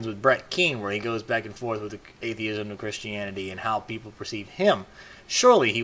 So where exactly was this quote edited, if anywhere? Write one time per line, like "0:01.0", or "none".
0:04.3